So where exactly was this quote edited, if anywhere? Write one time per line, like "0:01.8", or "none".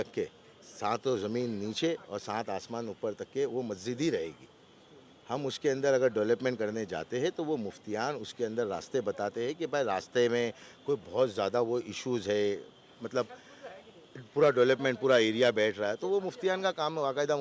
none